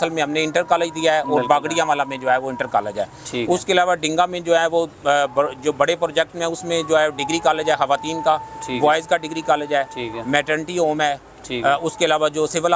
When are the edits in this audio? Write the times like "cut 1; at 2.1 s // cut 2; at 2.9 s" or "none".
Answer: none